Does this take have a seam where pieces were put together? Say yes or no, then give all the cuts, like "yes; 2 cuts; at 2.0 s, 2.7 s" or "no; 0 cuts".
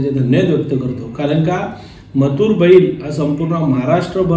no; 0 cuts